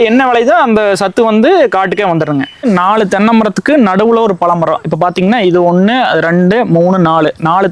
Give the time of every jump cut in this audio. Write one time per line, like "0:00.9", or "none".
0:02.6

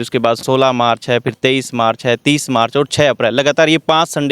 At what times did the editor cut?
none

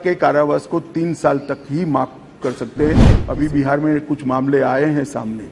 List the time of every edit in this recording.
0:03.2

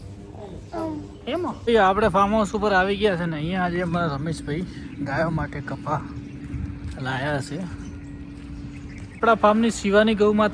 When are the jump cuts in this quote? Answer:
0:01.6
0:09.2

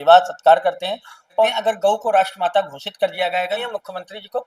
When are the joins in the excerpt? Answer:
0:01.4
0:03.6

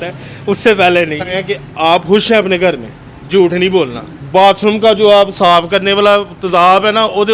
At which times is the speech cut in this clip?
0:01.2
0:03.9

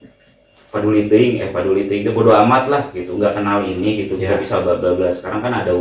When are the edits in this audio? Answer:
none

